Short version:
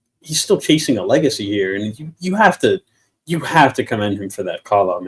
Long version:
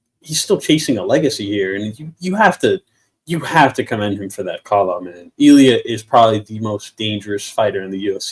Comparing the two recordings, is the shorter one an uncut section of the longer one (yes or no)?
yes